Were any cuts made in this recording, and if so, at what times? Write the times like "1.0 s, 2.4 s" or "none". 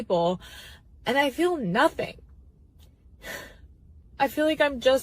2.1 s